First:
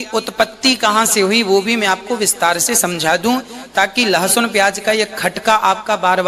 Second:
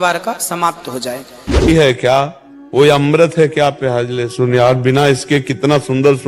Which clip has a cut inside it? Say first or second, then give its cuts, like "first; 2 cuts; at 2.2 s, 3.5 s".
second; 1 cut; at 1.7 s